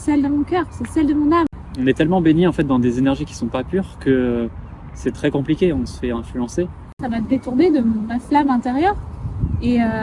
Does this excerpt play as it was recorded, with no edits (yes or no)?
no